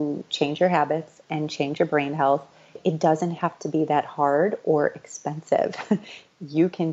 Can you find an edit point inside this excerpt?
yes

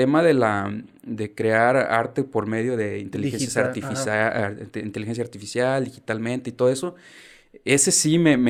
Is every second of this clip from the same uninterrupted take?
yes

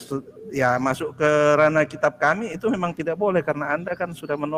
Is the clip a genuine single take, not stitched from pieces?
yes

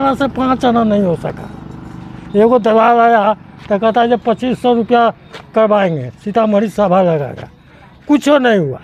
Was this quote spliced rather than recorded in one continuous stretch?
no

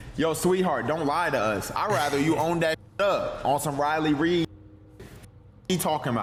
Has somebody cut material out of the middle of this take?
no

